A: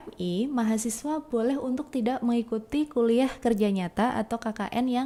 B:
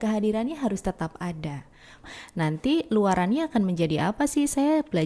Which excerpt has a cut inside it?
B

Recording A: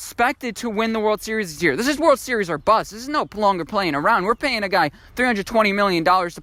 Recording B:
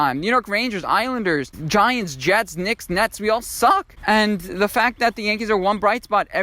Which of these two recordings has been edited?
B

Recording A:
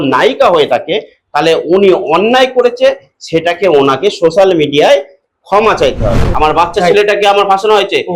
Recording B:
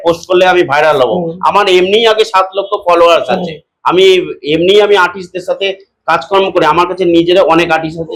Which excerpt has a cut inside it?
A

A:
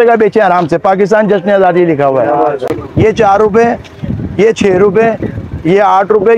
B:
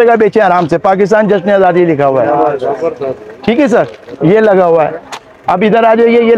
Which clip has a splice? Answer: A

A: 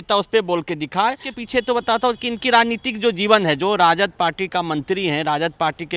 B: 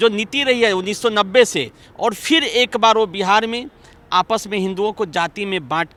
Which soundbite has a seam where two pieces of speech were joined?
A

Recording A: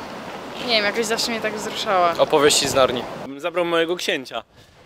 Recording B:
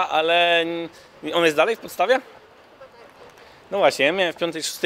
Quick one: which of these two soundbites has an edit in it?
A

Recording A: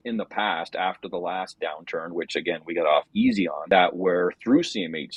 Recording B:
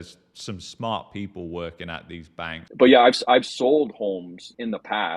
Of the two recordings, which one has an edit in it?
B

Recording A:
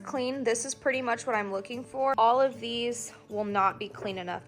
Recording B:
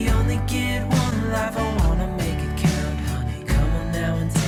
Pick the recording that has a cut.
A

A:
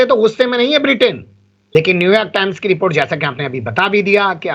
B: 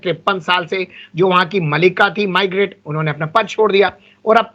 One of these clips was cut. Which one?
A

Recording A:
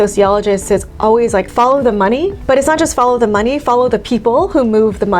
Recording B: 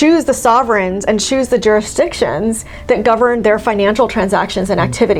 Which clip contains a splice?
A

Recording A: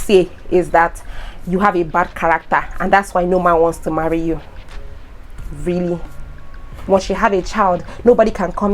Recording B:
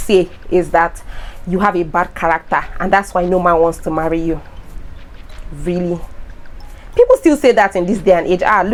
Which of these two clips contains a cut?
A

